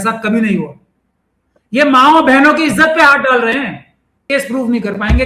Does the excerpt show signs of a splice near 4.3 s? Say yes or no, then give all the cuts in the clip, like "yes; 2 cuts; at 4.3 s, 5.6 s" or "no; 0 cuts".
yes; 1 cut; at 4.3 s